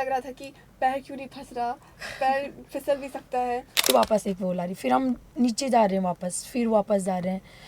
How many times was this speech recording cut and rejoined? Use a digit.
1